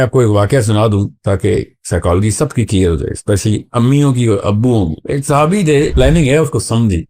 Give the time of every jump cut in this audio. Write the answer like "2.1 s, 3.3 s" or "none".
5.9 s